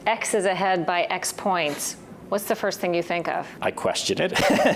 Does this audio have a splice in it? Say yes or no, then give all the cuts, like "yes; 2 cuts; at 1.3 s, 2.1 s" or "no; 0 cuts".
yes; 1 cut; at 3.5 s